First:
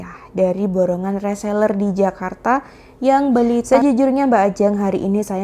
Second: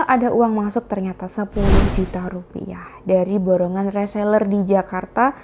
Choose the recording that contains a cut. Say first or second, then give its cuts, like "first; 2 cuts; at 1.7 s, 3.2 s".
first; 1 cut; at 3.6 s